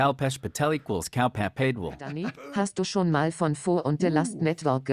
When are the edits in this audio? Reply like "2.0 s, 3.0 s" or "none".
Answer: 2.3 s